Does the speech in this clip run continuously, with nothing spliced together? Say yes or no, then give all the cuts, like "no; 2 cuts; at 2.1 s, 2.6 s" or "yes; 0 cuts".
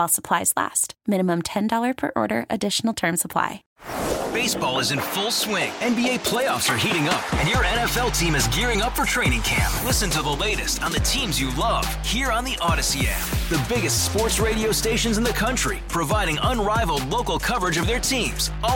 no; 1 cut; at 3.6 s